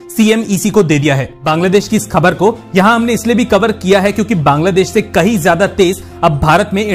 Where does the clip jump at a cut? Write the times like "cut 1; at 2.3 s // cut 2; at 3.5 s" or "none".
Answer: cut 1; at 1.4 s